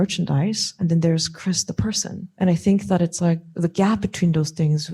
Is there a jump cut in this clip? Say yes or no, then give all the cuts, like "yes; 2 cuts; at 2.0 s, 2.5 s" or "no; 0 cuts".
yes; 2 cuts; at 0.8 s, 2.3 s